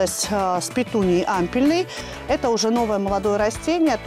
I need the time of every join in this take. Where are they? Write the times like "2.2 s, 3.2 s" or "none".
2.0 s